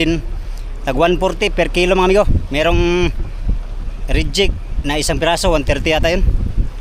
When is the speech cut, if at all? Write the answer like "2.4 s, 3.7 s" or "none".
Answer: none